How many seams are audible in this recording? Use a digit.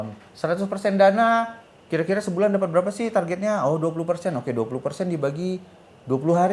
0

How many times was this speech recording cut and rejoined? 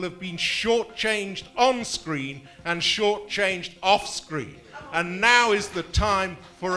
0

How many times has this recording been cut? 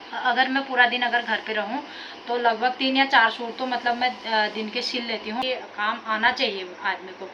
1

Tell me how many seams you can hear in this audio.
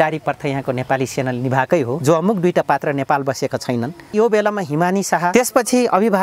3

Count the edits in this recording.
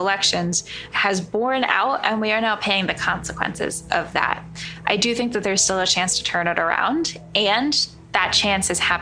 0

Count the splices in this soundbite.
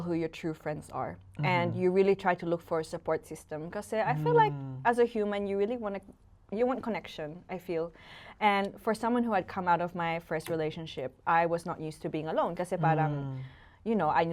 0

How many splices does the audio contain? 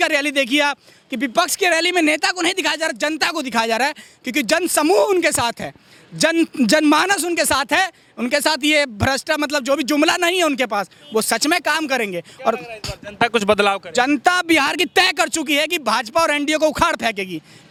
0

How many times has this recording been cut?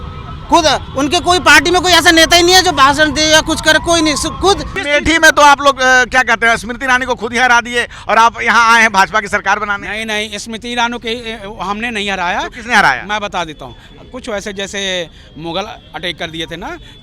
1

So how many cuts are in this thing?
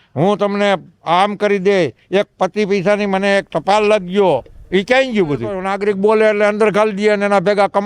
1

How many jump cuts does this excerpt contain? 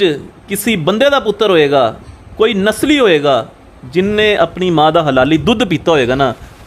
0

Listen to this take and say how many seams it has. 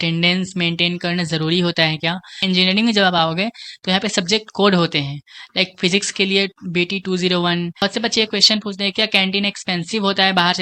2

